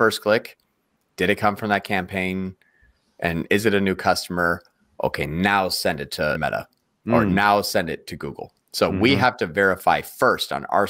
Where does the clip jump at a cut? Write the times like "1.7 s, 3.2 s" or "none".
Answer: 6.4 s